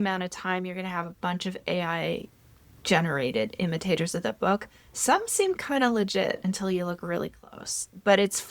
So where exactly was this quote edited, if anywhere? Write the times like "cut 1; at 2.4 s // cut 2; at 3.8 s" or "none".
none